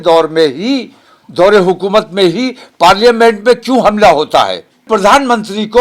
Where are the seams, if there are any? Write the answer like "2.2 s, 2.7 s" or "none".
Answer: 4.9 s